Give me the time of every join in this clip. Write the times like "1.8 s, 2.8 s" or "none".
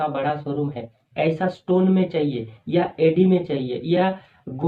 1.0 s